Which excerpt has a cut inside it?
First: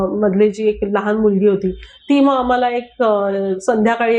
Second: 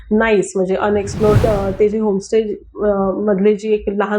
second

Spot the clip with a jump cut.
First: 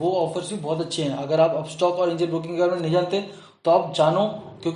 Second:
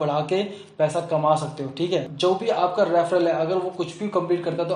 second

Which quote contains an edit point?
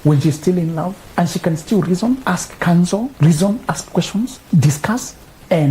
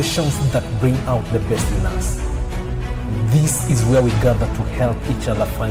first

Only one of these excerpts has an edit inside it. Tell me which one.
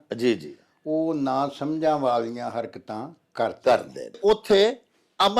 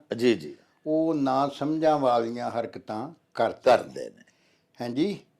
first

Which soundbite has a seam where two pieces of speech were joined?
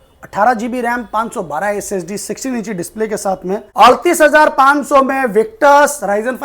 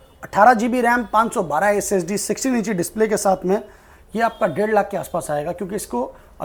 first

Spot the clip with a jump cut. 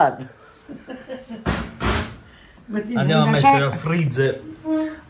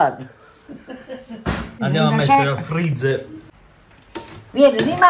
second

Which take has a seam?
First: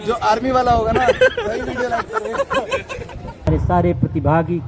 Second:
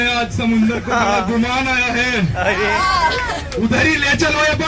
first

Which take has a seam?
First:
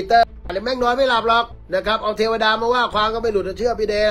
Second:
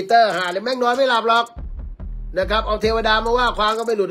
first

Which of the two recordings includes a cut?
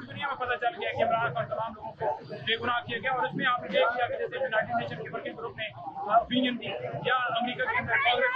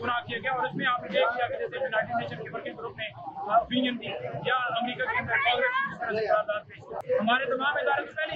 second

